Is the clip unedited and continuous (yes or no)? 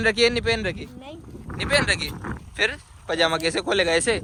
yes